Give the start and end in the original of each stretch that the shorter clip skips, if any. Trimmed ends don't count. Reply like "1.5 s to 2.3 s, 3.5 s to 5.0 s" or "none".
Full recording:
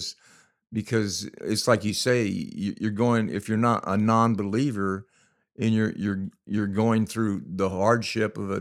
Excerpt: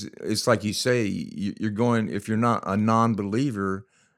none